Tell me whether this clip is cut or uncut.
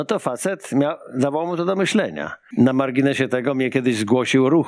cut